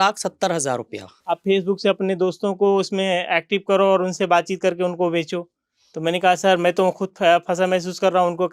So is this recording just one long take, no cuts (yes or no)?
no